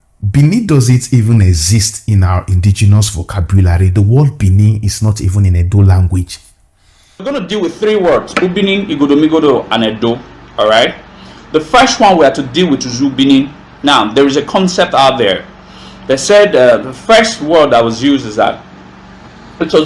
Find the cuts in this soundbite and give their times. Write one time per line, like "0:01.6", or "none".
0:07.2